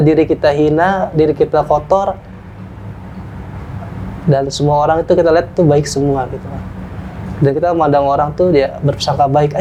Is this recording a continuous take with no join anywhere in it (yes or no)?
yes